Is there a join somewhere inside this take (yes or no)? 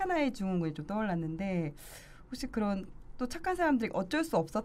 no